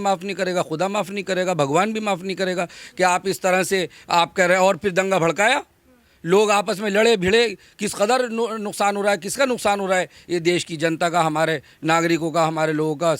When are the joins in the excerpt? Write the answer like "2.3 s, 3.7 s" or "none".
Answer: none